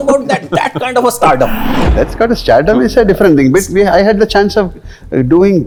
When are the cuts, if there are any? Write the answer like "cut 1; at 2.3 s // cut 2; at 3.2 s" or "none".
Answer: none